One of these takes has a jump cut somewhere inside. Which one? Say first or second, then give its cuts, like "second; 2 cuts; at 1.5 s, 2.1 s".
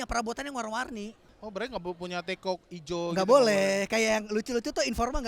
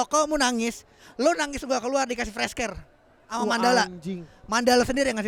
first; 1 cut; at 1.4 s